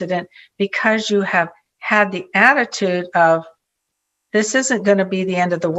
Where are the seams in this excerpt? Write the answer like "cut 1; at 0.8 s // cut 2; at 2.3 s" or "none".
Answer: none